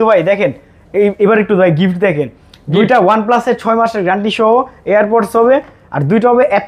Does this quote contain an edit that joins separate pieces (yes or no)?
no